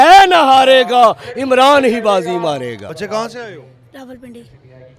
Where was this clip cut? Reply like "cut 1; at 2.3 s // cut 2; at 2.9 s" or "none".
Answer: none